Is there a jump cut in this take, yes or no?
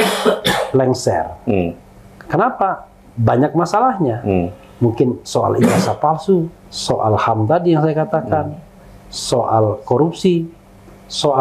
no